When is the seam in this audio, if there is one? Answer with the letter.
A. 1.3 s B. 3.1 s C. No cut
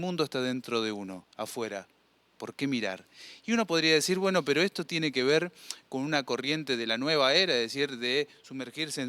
C